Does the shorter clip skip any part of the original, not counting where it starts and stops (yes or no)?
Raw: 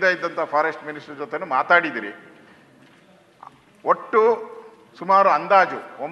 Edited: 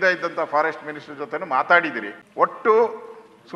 yes